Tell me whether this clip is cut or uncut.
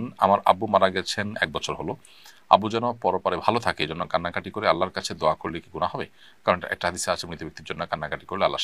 uncut